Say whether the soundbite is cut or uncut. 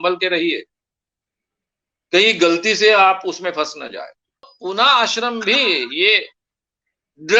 cut